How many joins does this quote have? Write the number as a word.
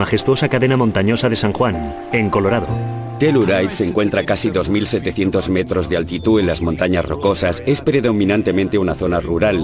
one